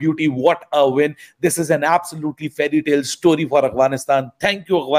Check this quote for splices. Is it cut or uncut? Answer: uncut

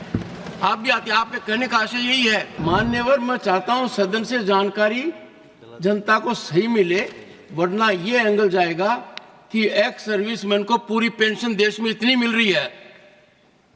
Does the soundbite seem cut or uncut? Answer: cut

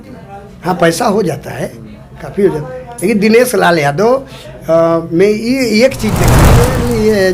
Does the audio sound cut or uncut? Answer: cut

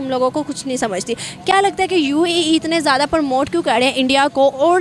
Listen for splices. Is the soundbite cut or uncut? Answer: uncut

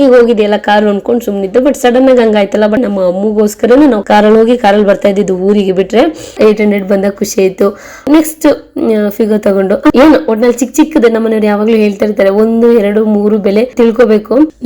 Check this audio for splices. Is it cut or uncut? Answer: cut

